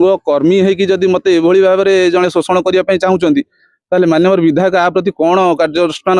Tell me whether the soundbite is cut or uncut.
uncut